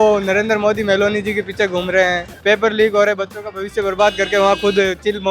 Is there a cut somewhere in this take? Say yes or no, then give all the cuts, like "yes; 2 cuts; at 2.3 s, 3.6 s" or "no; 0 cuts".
yes; 1 cut; at 2.3 s